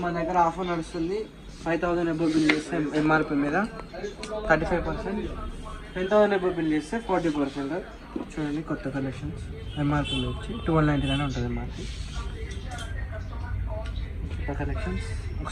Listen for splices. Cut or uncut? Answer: uncut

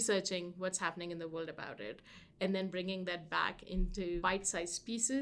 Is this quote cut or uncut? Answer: cut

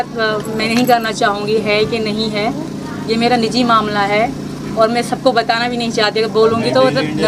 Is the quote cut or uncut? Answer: uncut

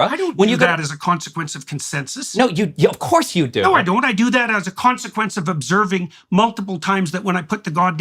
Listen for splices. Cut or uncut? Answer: uncut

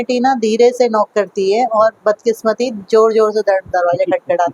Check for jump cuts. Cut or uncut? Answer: uncut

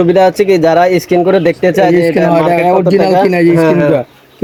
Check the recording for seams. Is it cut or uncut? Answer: uncut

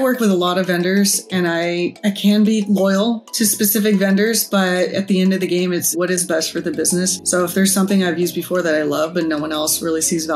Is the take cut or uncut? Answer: cut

